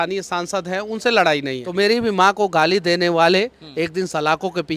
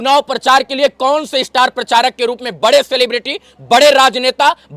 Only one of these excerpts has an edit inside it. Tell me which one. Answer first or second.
first